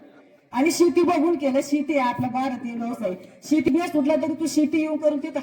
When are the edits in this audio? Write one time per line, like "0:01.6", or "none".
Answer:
0:03.7